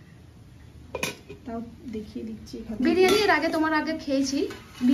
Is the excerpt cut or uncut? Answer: uncut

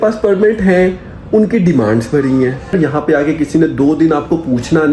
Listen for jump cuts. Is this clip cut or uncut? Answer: cut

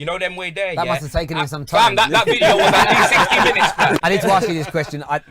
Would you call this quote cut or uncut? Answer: cut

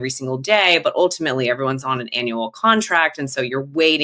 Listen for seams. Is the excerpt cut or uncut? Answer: uncut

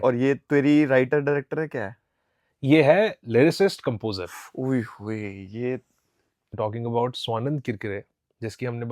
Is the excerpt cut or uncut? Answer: uncut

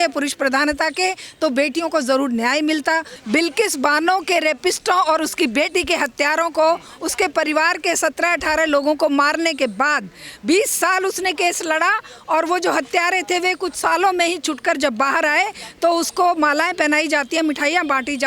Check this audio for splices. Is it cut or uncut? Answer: cut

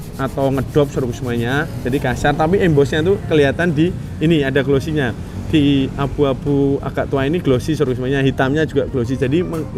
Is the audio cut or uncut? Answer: uncut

